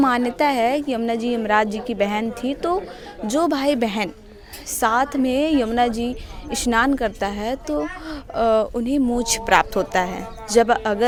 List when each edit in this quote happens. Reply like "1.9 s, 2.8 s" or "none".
none